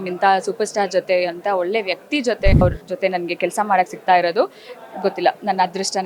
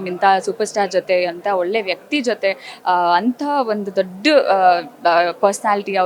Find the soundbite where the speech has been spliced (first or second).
first